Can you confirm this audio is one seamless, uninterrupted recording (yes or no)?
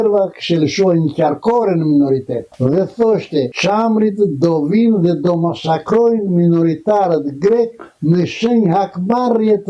yes